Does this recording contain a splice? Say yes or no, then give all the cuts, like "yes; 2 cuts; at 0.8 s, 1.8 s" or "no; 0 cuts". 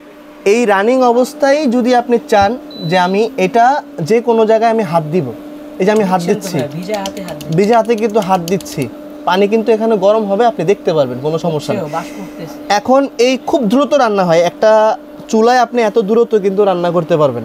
no; 0 cuts